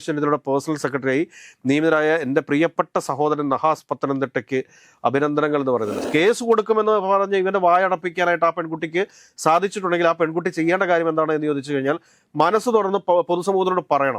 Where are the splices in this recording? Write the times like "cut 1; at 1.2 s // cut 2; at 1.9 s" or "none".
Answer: cut 1; at 6.0 s